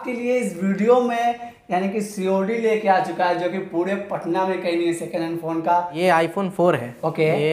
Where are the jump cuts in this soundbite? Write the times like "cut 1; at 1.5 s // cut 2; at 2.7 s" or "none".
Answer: cut 1; at 5.9 s